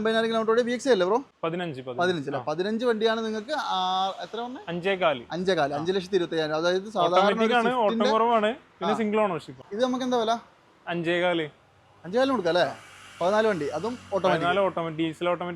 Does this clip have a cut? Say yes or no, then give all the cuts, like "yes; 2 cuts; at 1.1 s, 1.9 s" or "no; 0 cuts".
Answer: yes; 2 cuts; at 1.3 s, 9.6 s